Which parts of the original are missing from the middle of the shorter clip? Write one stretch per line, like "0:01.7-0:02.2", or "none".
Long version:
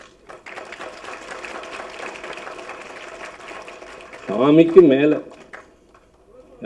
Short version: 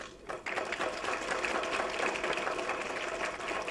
none